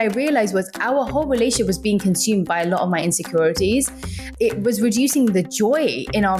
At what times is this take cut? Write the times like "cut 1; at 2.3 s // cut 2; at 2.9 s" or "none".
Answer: cut 1; at 4.3 s